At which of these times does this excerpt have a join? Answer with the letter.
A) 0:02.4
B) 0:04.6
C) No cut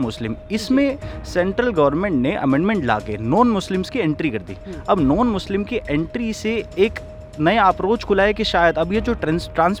C